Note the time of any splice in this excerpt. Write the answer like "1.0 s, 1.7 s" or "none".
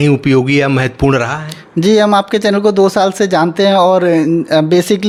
none